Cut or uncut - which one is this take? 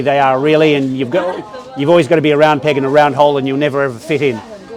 uncut